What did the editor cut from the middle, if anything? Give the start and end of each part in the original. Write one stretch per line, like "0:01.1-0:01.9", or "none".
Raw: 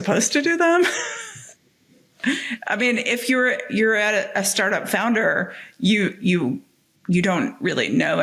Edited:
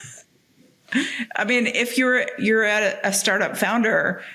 none